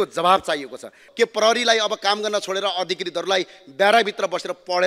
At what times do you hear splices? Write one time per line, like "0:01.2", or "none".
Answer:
0:01.0